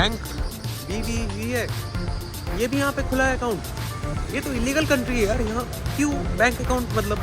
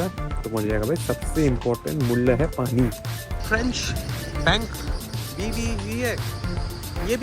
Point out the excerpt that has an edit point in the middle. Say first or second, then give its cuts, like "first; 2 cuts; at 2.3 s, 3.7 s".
second; 1 cut; at 3.4 s